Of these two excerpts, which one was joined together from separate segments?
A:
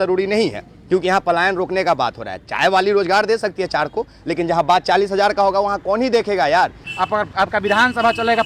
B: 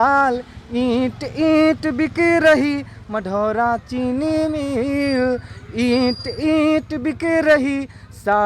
A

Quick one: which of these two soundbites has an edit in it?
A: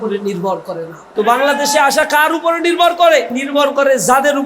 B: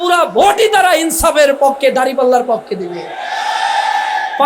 A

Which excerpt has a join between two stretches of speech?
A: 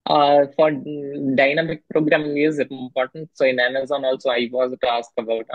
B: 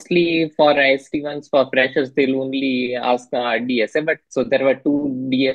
B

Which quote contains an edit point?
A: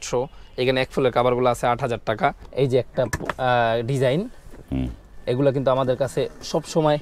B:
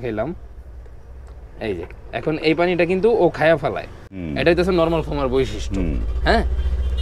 A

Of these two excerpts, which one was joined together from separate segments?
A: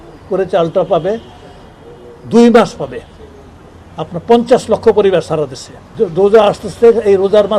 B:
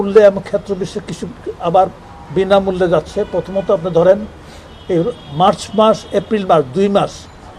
A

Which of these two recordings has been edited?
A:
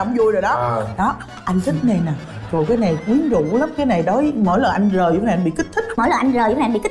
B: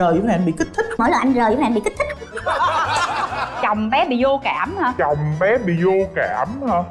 B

